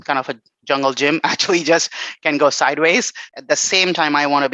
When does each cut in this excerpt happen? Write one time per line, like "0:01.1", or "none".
0:03.2